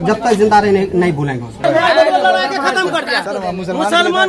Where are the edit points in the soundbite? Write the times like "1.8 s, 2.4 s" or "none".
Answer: 1.6 s